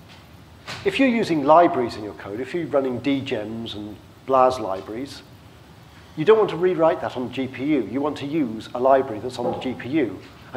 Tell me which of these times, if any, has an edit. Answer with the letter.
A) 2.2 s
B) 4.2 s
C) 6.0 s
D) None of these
C